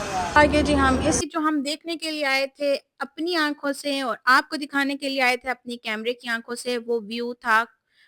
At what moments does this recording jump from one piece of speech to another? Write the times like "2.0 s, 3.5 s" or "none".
1.2 s